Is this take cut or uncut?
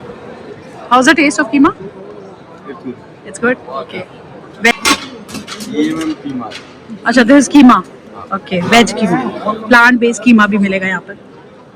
cut